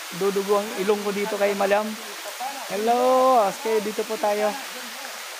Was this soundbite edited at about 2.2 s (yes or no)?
no